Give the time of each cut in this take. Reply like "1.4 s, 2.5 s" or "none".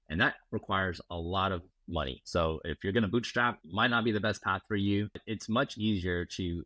2.2 s, 3.6 s, 5.2 s

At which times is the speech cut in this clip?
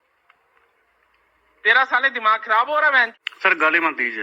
3.1 s

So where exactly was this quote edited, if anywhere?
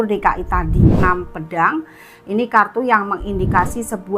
1.0 s

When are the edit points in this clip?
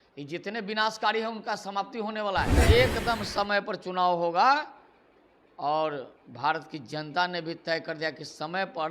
2.6 s

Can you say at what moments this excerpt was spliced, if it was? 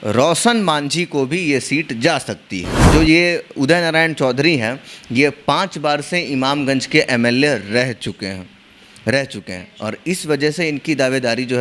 2.8 s

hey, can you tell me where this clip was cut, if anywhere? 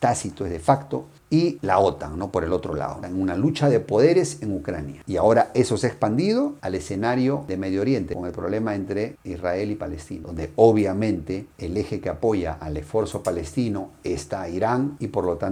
none

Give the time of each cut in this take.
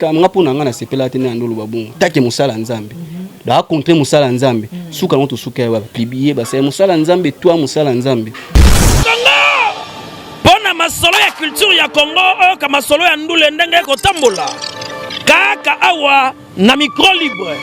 8.4 s

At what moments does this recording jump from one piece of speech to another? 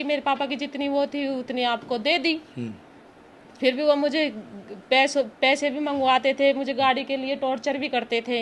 none

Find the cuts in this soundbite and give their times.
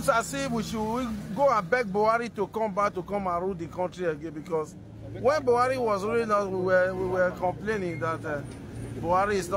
none

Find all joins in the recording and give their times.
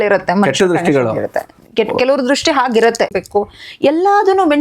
3.1 s

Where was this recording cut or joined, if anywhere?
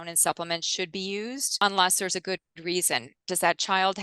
1.4 s

